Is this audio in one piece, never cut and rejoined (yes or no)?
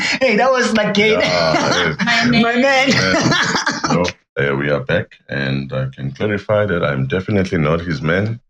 no